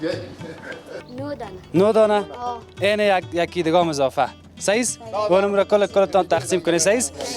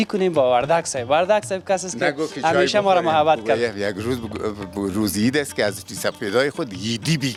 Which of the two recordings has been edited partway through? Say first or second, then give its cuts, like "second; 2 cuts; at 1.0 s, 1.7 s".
first; 1 cut; at 1.0 s